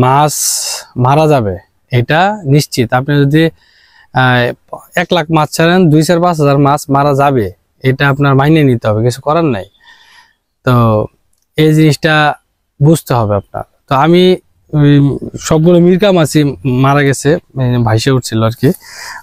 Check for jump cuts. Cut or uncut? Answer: uncut